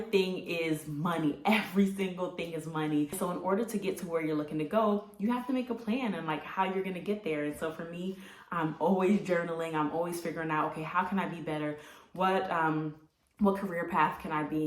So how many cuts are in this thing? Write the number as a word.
one